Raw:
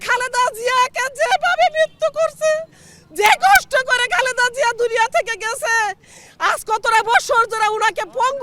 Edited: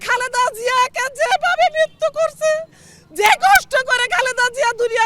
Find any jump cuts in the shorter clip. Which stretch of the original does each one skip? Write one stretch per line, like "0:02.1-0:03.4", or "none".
none

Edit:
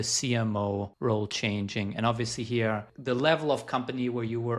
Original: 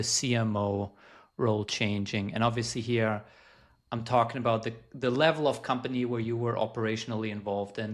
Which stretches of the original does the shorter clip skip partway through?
0:00.9-0:01.3
0:03.3-0:04.9

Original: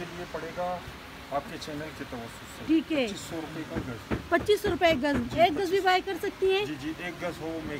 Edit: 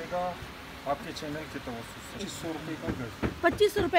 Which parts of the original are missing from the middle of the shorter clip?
0:02.6-0:03.1

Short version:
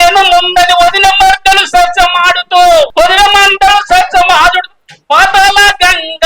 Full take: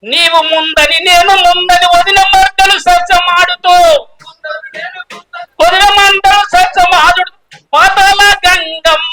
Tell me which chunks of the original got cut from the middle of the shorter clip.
0:04.0-0:05.5

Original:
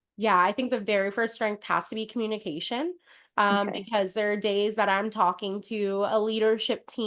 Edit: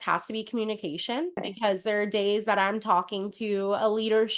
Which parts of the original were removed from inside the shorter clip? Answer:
0:03.1-0:03.8

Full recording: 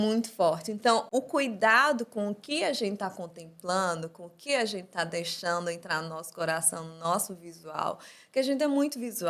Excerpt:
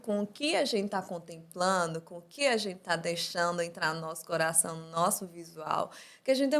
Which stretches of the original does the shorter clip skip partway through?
none

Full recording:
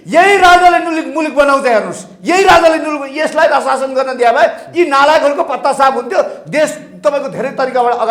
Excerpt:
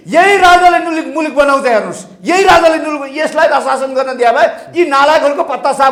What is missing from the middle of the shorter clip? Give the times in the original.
none

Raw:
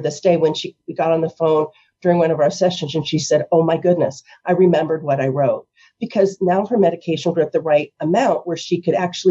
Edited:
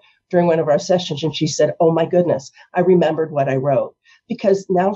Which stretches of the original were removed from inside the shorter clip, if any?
none

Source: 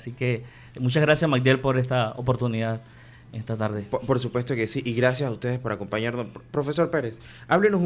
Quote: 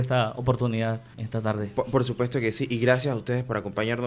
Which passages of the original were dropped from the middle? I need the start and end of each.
0:02.9-0:03.3

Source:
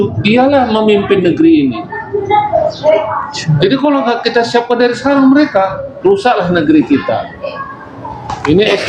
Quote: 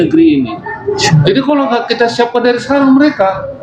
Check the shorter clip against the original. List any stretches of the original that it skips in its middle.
0:02.3-0:03.4

